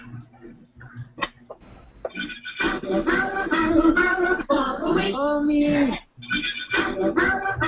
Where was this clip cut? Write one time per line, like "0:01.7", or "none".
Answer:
0:04.1